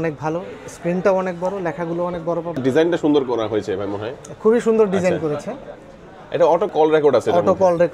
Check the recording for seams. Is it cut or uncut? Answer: cut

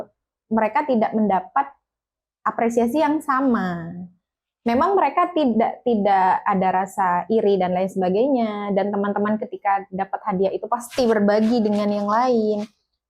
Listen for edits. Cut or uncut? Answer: uncut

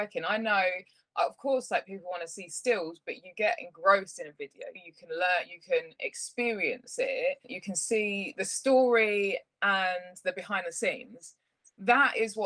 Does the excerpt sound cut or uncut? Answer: uncut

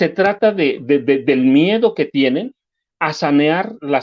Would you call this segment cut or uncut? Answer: uncut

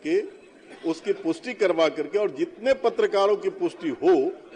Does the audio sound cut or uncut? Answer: uncut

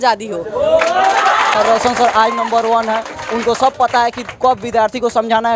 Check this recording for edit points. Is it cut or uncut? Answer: cut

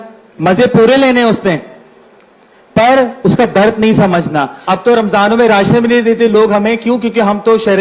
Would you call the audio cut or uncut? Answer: cut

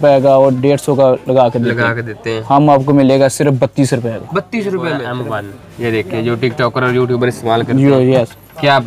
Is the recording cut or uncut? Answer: cut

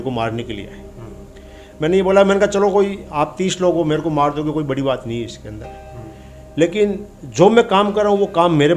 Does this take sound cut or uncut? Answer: uncut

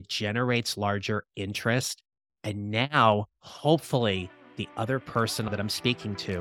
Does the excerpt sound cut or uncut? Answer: cut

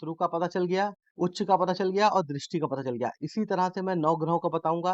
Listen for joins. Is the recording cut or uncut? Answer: cut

